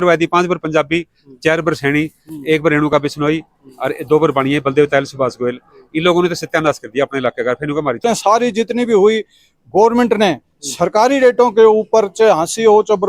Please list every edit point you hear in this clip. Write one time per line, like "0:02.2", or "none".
0:08.0